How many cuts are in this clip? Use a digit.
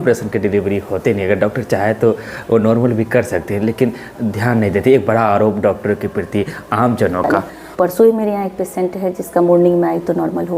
1